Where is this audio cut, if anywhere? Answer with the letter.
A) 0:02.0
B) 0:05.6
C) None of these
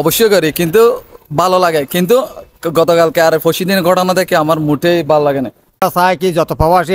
B